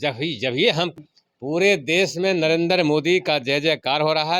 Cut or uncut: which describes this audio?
cut